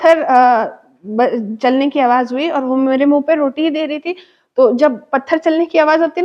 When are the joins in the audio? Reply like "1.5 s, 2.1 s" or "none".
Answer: none